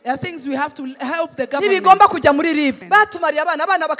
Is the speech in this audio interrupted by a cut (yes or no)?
yes